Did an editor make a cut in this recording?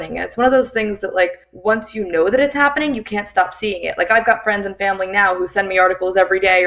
yes; 1 cut; at 1.5 s

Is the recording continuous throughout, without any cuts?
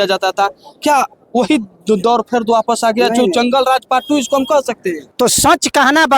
no; 1 cut; at 5.0 s

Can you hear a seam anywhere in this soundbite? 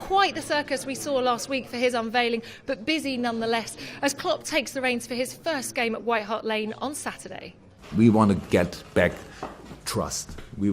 yes; 1 cut; at 2.7 s

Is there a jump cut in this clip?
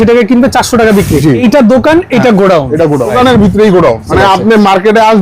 yes; 3 cuts; at 1.4 s, 3.1 s, 4.1 s

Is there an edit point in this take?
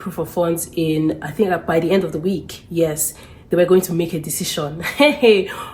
no; 0 cuts

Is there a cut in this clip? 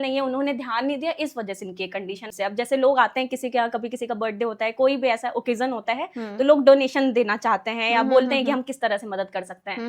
yes; 1 cut; at 2.3 s

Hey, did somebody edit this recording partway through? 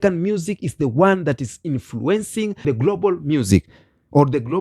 yes; 1 cut; at 2.6 s

